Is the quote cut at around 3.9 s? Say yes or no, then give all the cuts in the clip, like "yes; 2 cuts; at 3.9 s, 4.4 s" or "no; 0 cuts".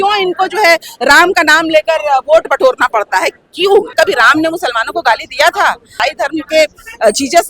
yes; 2 cuts; at 3.9 s, 5.9 s